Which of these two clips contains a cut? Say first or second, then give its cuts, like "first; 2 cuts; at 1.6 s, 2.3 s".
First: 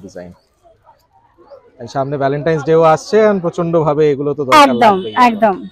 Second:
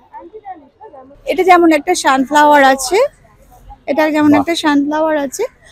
second; 1 cut; at 1.1 s